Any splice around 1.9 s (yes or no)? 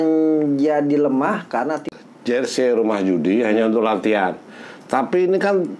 yes